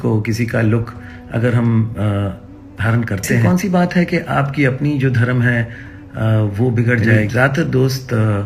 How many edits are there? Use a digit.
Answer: 2